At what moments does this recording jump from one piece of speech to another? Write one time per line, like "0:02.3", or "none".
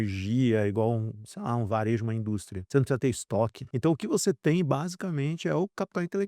0:02.5
0:03.6